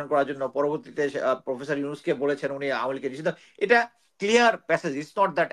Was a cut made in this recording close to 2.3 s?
no; 0 cuts

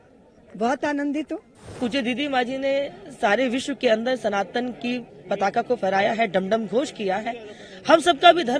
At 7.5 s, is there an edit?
no; 1 cut; at 1.8 s

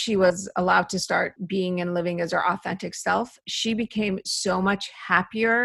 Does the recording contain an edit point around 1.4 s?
yes; 1 cut; at 1.4 s

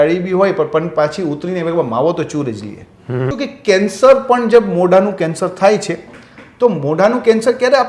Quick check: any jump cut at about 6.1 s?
no; 1 cut; at 3.3 s

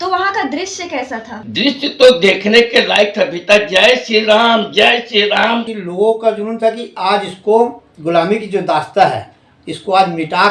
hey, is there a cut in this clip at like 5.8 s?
yes; 2 cuts; at 1.4 s, 5.8 s

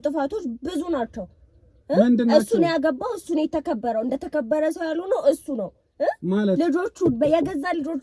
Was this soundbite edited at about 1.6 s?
no; 0 cuts

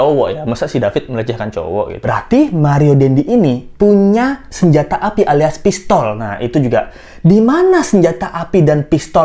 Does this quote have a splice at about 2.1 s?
yes; 1 cut; at 2.1 s

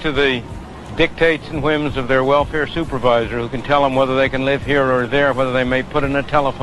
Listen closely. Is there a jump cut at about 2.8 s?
no; 0 cuts

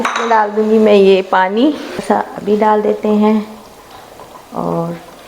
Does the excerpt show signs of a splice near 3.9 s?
no; 1 cut; at 2.0 s

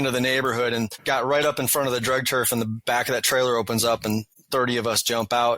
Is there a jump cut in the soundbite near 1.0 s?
yes; 2 cuts; at 1.0 s, 4.3 s

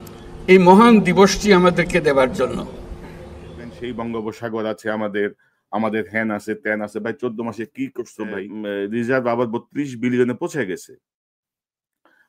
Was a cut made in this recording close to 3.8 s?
yes; 2 cuts; at 3.8 s, 8.5 s

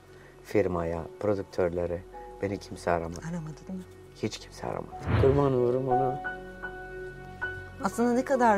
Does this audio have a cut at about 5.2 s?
yes; 1 cut; at 5.2 s

